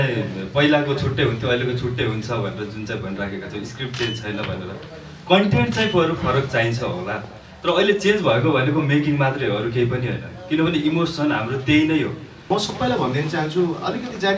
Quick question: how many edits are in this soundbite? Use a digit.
1